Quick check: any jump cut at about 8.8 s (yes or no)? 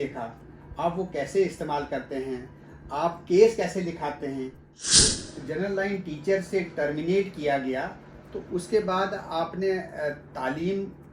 no